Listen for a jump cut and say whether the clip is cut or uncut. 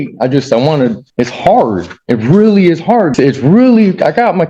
cut